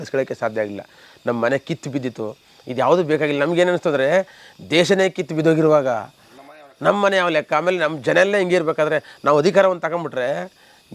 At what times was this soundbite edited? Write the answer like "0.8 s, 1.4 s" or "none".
none